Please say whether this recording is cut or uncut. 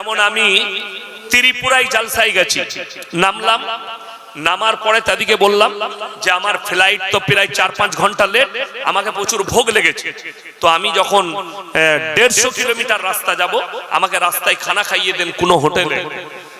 uncut